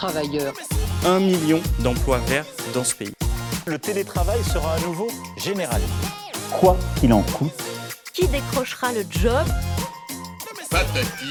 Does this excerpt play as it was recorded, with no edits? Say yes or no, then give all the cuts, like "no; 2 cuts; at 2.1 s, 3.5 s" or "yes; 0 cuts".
yes; 0 cuts